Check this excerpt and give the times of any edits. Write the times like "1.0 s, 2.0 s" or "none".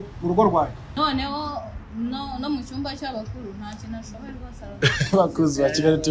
1.0 s

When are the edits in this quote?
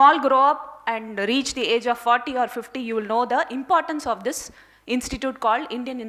none

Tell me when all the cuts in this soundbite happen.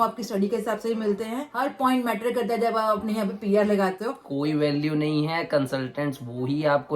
1.5 s, 4.2 s

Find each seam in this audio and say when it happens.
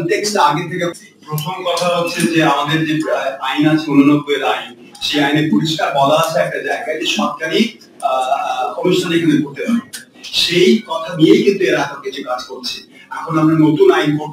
0.9 s

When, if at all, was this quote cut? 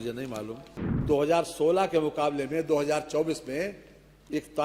1.0 s

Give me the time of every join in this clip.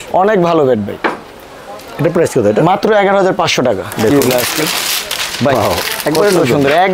3.8 s

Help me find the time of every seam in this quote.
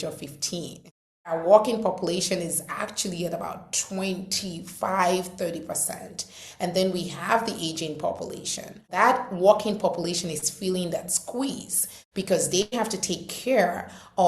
1.3 s, 8.9 s

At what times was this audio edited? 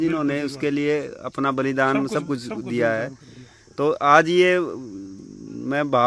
none

